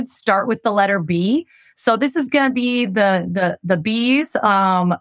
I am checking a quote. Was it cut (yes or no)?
no